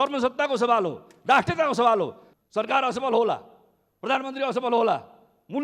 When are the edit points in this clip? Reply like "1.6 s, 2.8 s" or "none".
2.3 s